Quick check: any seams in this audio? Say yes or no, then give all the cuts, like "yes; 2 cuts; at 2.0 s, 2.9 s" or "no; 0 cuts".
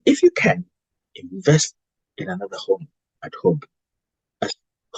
no; 0 cuts